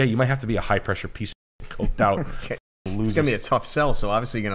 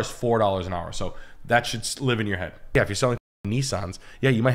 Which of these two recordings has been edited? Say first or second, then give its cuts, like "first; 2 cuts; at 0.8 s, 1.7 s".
second; 1 cut; at 2.7 s